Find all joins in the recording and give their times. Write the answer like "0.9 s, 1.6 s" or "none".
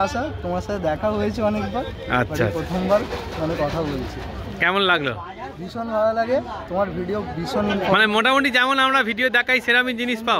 none